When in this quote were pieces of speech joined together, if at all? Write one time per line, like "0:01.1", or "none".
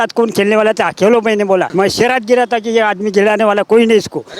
0:01.7